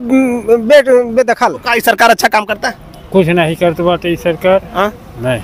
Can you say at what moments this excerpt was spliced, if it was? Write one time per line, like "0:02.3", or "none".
0:01.7